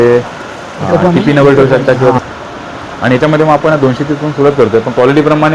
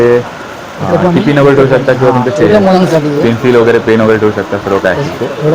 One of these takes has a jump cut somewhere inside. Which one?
first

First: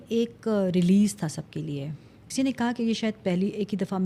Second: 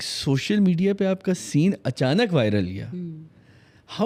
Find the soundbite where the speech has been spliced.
first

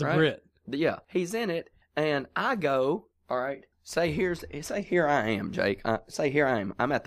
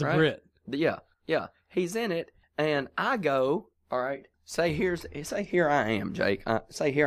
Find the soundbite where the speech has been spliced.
first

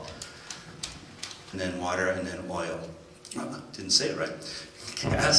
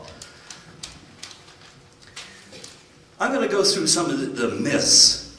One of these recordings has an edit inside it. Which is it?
second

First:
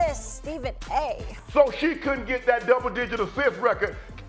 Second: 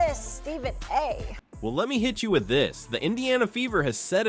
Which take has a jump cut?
first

